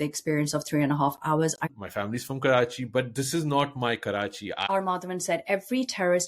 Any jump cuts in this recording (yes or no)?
yes